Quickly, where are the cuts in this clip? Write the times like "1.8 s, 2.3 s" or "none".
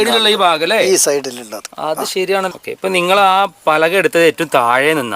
2.5 s